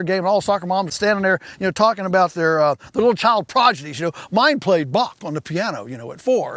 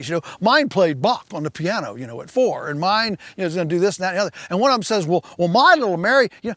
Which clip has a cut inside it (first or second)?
first